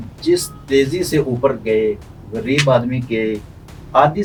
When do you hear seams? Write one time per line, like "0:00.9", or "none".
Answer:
none